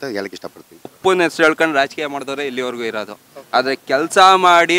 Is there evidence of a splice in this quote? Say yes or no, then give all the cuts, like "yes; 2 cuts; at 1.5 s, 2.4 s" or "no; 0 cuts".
yes; 1 cut; at 0.9 s